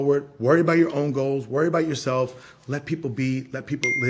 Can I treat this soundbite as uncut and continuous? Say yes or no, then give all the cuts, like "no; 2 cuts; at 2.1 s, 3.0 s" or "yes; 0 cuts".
yes; 0 cuts